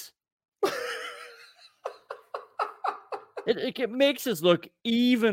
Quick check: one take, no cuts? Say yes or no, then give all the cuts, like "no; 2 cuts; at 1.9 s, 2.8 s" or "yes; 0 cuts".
yes; 0 cuts